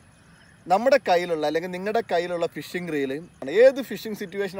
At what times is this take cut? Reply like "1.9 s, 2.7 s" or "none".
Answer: 3.4 s